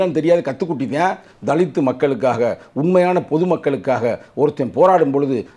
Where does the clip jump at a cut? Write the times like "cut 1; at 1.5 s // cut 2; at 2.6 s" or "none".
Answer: cut 1; at 1.3 s